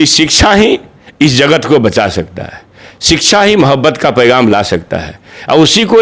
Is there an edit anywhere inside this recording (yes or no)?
no